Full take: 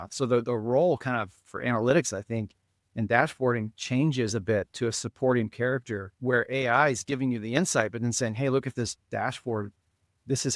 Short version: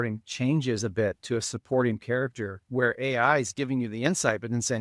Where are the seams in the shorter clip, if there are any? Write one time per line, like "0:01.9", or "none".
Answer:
none